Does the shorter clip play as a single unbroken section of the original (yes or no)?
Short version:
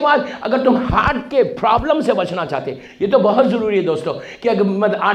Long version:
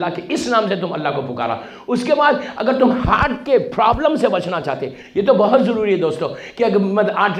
yes